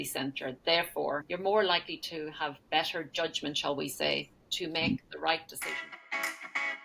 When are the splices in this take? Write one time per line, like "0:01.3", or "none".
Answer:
0:01.3
0:05.9